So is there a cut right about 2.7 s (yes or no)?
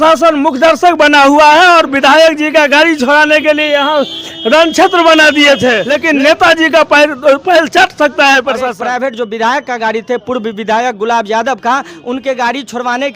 no